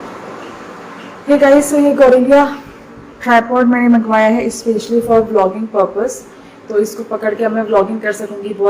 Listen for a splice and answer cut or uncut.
uncut